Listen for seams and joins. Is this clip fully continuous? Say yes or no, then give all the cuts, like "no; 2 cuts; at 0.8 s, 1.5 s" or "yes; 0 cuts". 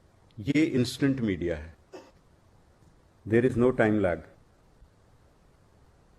yes; 0 cuts